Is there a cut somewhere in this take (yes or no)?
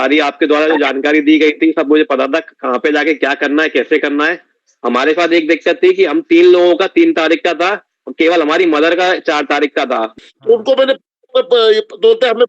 yes